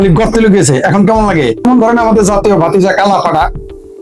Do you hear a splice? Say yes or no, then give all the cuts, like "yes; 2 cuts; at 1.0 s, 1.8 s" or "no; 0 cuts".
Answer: yes; 1 cut; at 1.6 s